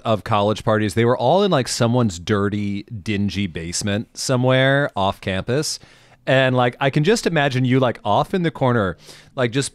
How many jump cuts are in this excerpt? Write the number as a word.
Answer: zero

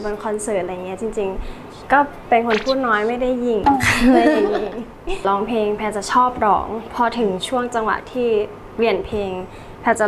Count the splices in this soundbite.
one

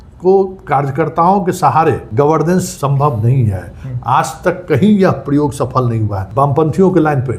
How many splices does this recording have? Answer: three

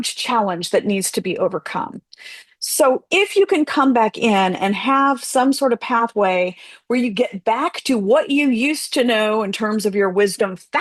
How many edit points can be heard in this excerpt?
zero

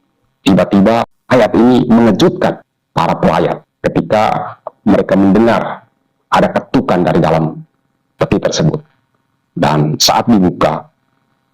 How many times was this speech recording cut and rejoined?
three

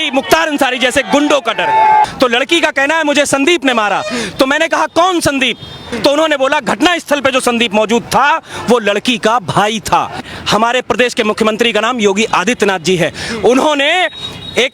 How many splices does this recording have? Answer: three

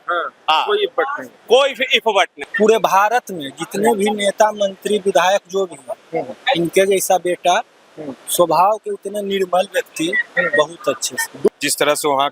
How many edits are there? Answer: two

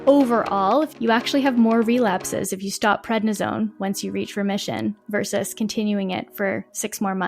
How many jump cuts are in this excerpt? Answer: one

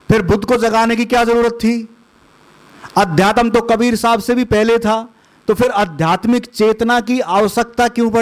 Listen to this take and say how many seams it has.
zero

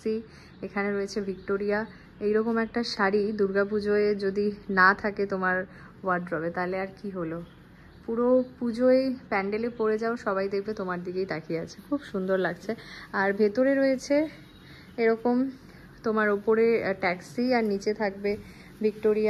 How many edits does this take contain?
zero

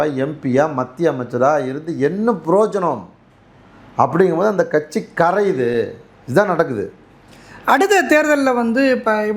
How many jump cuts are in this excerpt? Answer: zero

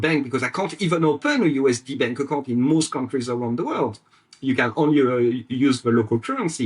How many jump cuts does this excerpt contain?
zero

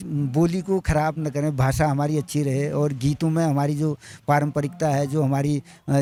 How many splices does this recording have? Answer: zero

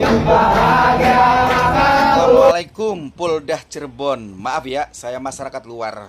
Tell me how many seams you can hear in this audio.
one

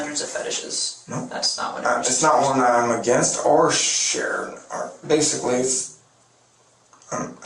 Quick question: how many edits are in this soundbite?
zero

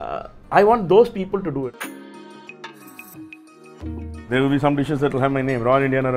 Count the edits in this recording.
one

